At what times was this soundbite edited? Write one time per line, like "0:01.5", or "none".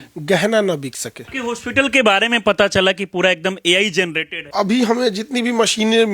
0:01.2
0:04.4